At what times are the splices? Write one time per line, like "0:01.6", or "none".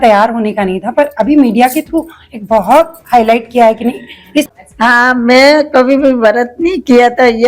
0:04.5